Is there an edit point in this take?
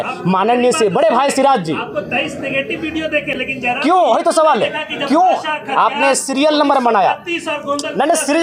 no; 0 cuts

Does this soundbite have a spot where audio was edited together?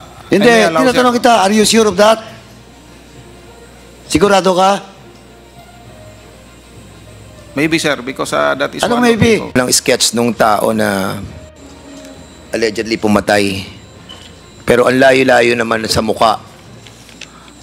yes; 1 cut; at 9.6 s

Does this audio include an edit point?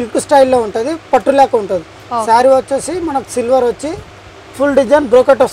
no; 0 cuts

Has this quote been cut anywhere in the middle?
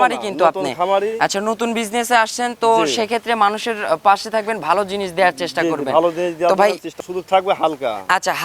yes; 1 cut; at 6.9 s

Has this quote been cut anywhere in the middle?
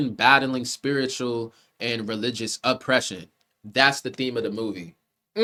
no; 0 cuts

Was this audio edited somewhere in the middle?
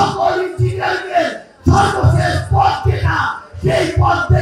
no; 0 cuts

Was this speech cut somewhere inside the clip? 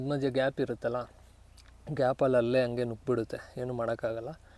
no; 0 cuts

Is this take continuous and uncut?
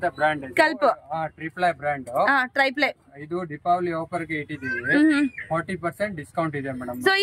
yes; 0 cuts

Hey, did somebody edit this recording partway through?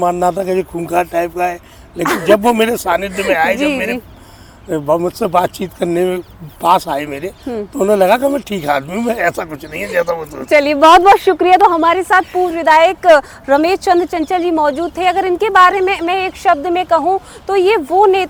no; 0 cuts

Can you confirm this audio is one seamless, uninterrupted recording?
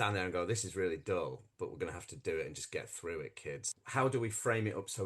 no; 1 cut; at 3.8 s

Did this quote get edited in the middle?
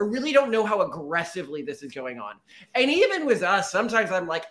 no; 0 cuts

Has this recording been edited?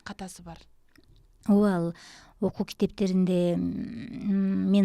no; 0 cuts

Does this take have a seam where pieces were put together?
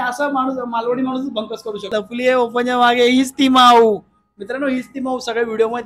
yes; 1 cut; at 1.9 s

